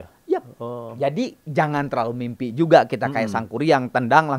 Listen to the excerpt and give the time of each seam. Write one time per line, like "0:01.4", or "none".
none